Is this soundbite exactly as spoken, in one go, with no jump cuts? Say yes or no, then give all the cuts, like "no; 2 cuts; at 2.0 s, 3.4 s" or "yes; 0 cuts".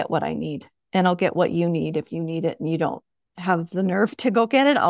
yes; 0 cuts